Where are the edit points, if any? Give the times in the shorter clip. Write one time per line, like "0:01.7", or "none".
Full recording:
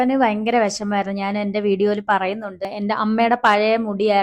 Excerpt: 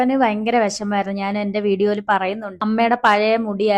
0:02.6